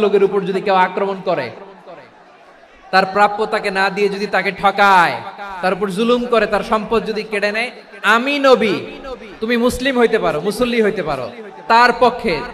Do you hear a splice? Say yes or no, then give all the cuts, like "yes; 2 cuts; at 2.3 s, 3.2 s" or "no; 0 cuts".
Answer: no; 0 cuts